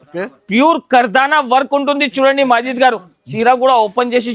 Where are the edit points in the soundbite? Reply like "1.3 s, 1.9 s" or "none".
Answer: 3.3 s